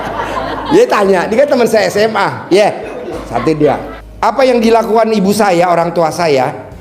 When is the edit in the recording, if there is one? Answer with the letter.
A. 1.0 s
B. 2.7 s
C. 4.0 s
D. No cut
C